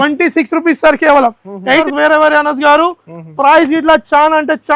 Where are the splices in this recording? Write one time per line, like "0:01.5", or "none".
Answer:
0:01.8